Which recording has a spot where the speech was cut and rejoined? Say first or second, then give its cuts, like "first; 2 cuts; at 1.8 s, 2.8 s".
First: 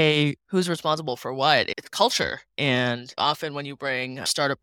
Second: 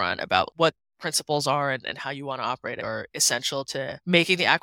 first; 1 cut; at 3.1 s